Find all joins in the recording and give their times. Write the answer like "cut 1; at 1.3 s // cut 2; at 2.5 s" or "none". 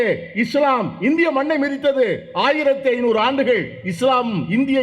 none